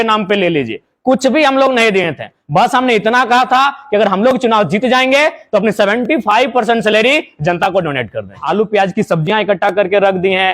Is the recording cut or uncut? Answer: cut